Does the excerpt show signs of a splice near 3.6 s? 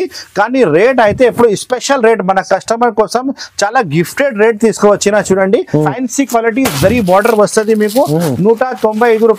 no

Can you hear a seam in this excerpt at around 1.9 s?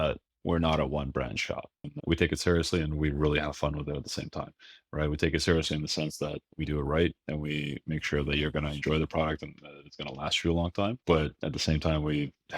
yes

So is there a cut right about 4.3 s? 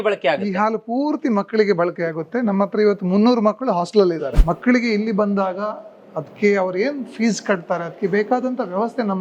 yes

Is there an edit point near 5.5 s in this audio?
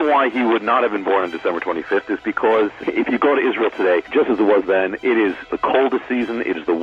yes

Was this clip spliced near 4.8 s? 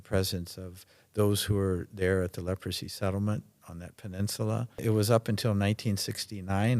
yes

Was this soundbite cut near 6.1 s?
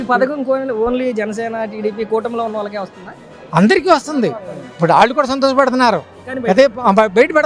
no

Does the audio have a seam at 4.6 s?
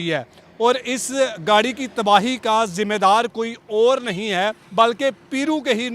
yes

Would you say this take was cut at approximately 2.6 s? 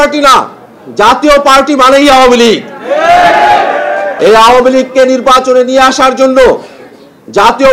no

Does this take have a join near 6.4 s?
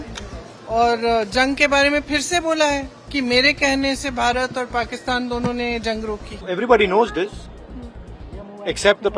yes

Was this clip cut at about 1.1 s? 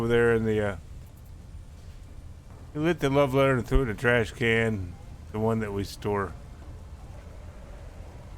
yes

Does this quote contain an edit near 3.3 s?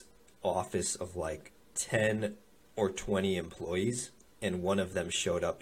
no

